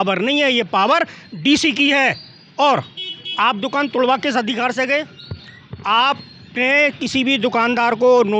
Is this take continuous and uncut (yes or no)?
yes